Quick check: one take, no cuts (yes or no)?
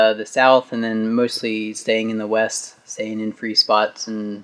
yes